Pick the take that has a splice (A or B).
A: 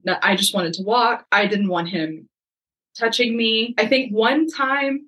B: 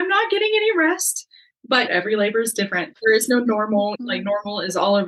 B